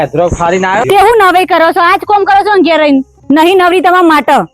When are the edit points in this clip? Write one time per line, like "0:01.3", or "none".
0:00.8
0:03.1